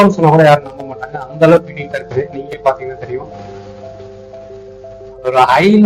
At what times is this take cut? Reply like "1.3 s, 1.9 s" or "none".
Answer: none